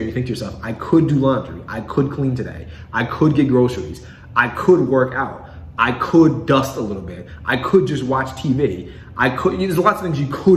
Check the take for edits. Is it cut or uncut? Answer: uncut